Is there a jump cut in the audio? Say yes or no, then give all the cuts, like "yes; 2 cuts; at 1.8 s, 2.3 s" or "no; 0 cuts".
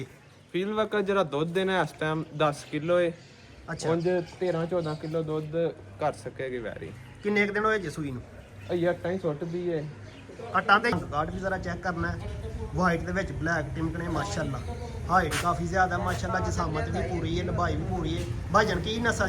yes; 1 cut; at 10.9 s